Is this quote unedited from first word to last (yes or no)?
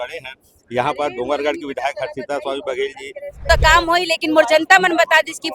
no